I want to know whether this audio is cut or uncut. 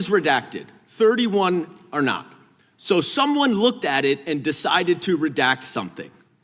uncut